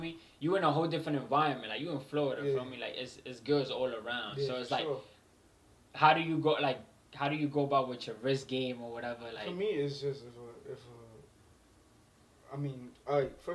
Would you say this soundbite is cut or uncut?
uncut